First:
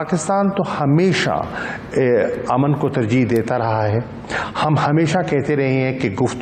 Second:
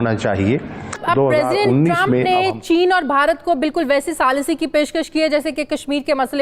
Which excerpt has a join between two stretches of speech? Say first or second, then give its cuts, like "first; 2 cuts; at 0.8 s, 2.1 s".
second; 1 cut; at 1.0 s